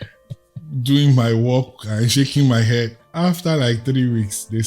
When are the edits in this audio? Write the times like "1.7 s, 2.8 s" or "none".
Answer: 3.0 s